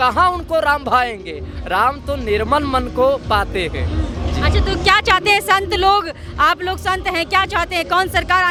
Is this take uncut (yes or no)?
yes